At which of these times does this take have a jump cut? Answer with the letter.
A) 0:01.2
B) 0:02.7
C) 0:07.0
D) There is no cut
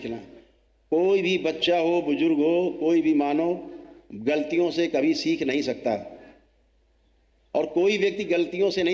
D